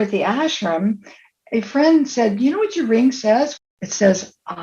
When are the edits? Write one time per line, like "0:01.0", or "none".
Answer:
0:03.6